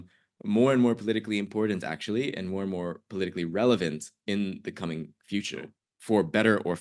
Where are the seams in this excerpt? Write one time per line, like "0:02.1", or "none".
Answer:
none